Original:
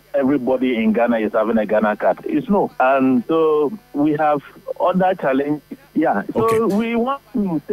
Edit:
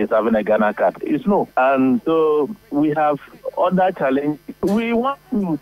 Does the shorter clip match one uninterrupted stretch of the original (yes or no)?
no